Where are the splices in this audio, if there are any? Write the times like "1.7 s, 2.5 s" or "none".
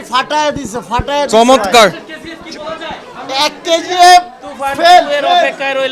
none